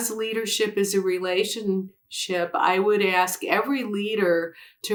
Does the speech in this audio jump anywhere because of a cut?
no; 0 cuts

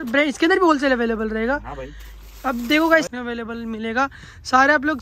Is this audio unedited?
no; 1 cut; at 3.1 s

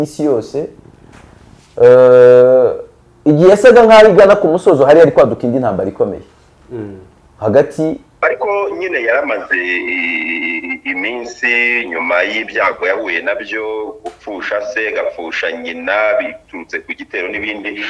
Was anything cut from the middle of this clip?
yes; 1 cut; at 8.2 s

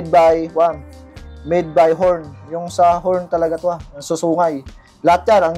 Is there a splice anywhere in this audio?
no; 0 cuts

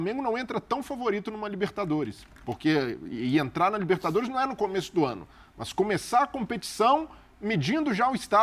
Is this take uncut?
yes; 0 cuts

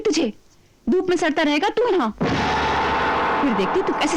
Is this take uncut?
yes; 0 cuts

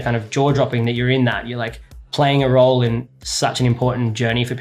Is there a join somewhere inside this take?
yes; 2 cuts; at 1.9 s, 3.1 s

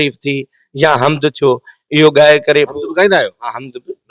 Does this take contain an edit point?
no; 0 cuts

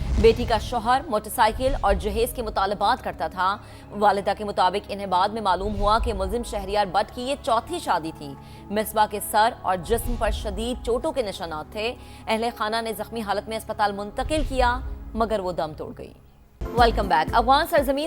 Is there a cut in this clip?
yes; 1 cut; at 16.6 s

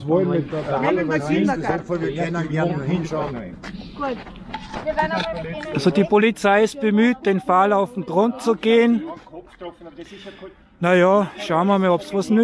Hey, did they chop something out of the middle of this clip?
no; 0 cuts

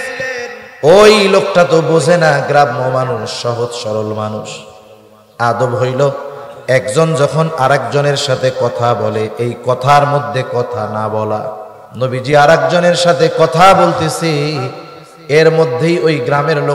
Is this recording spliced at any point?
yes; 1 cut; at 11.7 s

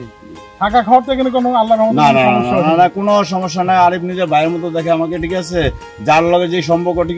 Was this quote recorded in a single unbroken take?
yes; 0 cuts

